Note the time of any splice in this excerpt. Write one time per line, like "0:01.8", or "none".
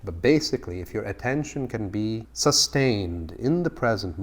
0:02.3

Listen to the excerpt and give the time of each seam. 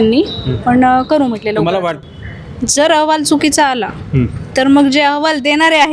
0:02.0

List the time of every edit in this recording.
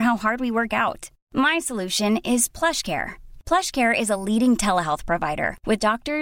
none

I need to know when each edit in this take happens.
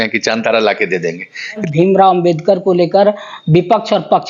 0:01.6

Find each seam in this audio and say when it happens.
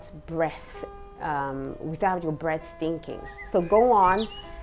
0:03.4

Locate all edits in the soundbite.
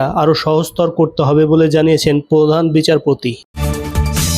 0:03.4

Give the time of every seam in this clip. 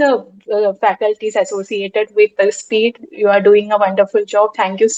none

